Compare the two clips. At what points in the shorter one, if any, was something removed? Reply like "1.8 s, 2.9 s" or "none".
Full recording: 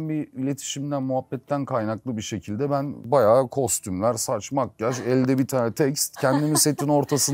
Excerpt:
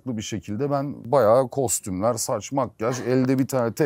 none

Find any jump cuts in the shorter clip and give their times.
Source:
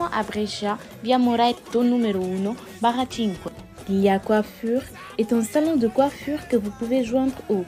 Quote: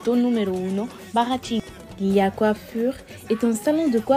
1.8 s

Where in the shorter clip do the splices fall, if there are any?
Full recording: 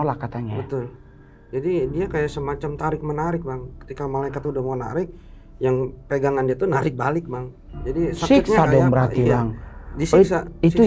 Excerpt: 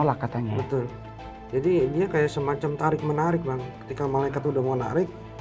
none

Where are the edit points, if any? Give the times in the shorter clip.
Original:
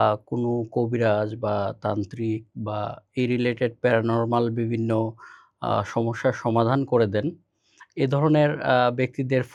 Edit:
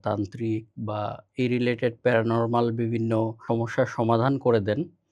3.4 s

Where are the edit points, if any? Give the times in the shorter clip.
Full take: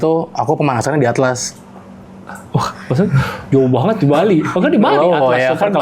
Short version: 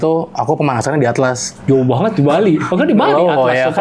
1.5 s

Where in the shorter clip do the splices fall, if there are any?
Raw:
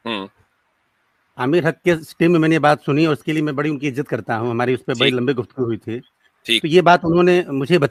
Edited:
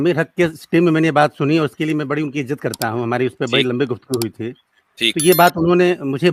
none

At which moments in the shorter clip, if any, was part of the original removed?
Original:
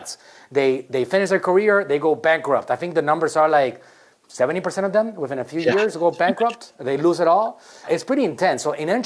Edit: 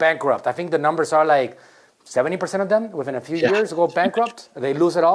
none

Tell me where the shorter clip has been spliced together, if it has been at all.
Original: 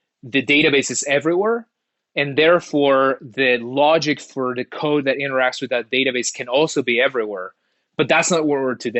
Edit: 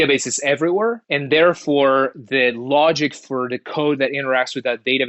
1.1 s

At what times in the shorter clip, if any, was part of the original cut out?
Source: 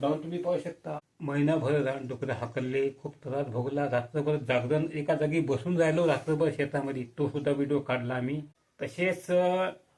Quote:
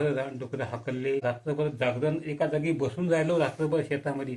1.2 s

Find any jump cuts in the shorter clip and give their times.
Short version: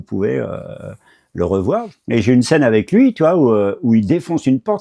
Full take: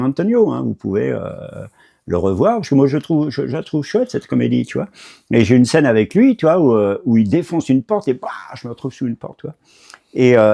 1.9 s

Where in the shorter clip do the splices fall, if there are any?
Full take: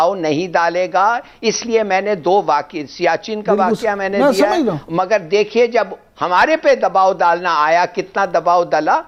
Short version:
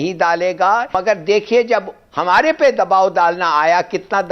0.9 s

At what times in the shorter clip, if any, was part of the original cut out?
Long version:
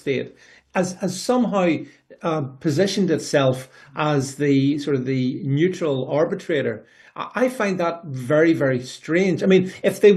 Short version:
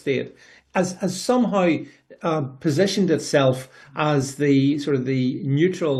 none

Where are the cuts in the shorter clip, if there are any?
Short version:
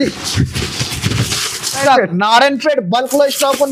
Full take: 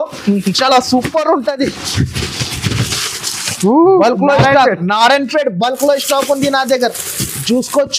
1.8 s

